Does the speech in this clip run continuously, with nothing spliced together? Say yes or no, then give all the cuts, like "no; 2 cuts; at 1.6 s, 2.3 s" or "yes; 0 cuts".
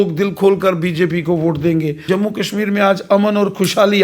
no; 1 cut; at 2.0 s